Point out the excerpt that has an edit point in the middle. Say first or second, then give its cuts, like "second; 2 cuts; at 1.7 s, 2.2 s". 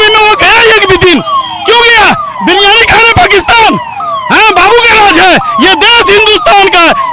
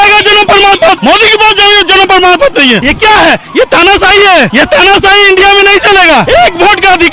second; 4 cuts; at 1.0 s, 2.9 s, 4.5 s, 6.3 s